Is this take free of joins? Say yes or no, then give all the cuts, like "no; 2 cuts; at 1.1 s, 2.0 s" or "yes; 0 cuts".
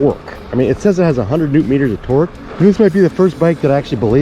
no; 1 cut; at 2.4 s